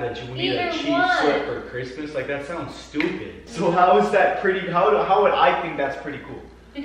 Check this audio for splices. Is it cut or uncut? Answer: cut